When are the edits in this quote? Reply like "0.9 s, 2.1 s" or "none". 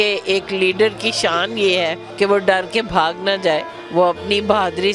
2.0 s, 3.8 s